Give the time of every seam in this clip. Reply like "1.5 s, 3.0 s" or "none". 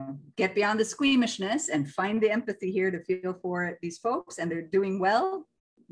none

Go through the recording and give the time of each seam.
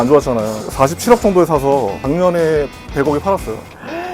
2.0 s

